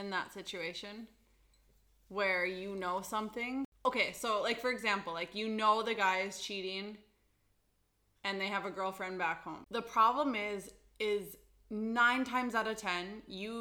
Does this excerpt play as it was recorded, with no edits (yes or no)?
no